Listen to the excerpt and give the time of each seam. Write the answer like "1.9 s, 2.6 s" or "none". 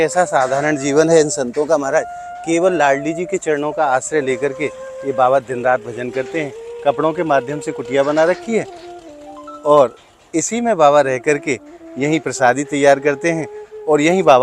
none